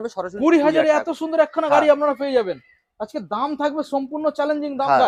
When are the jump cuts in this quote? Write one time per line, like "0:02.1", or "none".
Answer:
none